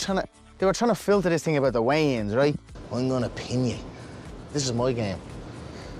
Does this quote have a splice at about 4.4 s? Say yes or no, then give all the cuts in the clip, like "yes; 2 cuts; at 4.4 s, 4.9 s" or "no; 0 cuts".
no; 1 cut; at 2.7 s